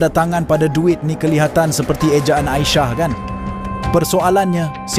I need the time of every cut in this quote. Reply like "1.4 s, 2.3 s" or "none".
none